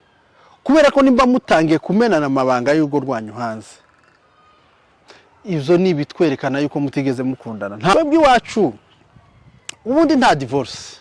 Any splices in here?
yes; 1 cut; at 7.9 s

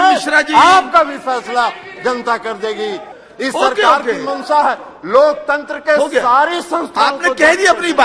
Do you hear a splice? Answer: yes; 1 cut; at 3.1 s

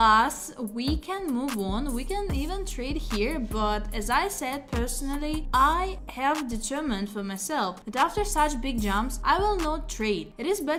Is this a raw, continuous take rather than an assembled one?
yes; 0 cuts

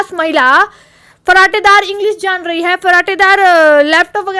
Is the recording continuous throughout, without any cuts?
yes; 0 cuts

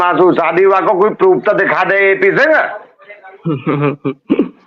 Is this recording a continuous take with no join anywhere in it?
yes; 0 cuts

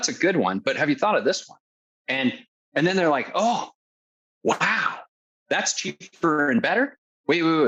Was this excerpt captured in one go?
yes; 0 cuts

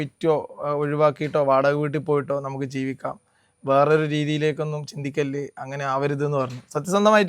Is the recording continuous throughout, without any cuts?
yes; 0 cuts

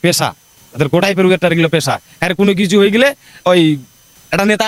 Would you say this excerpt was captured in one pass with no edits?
yes; 0 cuts

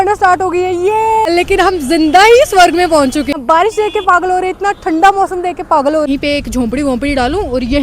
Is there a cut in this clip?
yes; 3 cuts; at 1.3 s, 3.3 s, 6.1 s

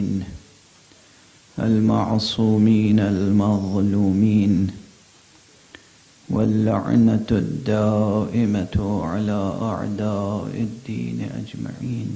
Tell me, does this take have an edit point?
no; 0 cuts

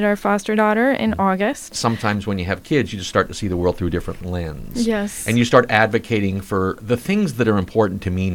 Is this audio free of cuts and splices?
no; 3 cuts; at 1.8 s, 4.2 s, 6.8 s

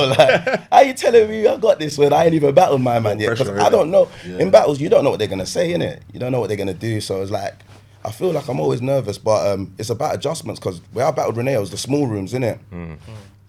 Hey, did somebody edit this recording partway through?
no; 0 cuts

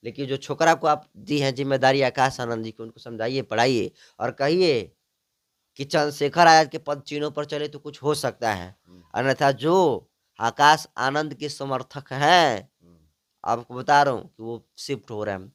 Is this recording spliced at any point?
no; 0 cuts

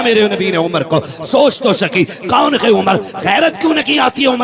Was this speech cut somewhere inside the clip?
no; 0 cuts

